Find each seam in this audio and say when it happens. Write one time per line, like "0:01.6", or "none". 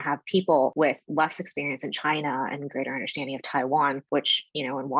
0:00.7
0:04.0

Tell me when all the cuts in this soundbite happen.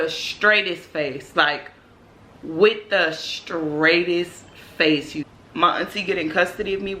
0:05.2

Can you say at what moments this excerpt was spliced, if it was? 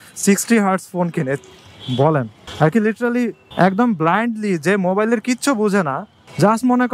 none

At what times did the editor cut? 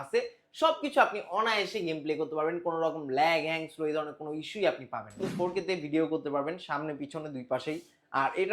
0:05.2

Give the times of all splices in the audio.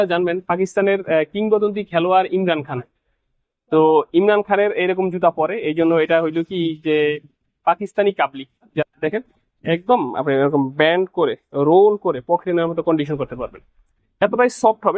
0:08.8

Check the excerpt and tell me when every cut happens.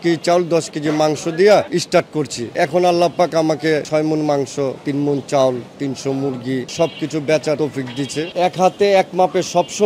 none

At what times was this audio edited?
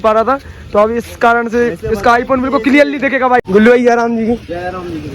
0:03.4

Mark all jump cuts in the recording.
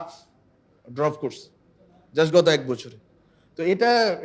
none

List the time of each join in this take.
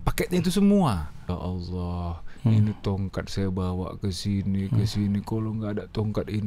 0:01.3

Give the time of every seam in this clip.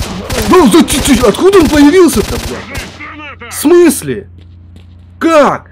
none

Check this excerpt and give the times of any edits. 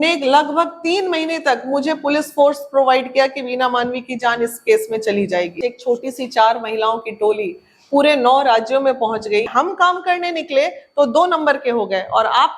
0:05.6
0:09.5

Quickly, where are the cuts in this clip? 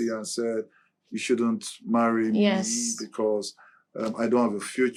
none

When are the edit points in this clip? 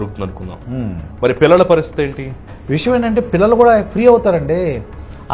0:02.5

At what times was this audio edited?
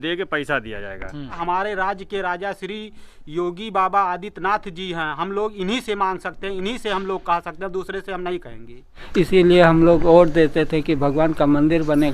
0:01.4
0:09.0

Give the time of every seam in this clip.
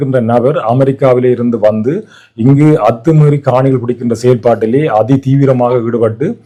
none

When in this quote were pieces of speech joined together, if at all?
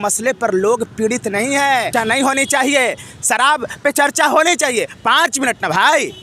0:01.9

